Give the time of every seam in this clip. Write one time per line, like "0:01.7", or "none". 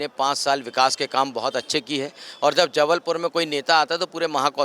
none